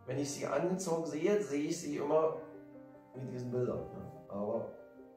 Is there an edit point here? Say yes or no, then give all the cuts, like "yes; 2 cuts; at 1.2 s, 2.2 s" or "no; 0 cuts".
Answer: no; 0 cuts